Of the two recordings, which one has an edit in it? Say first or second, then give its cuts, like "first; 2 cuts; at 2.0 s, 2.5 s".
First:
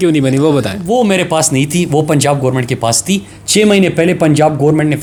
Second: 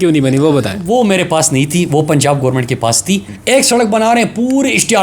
second; 1 cut; at 3.3 s